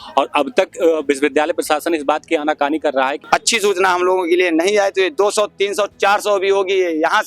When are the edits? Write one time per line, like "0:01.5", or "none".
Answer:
0:03.2